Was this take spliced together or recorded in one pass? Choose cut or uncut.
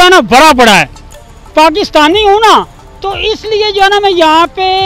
uncut